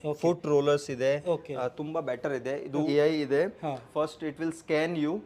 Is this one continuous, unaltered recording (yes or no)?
no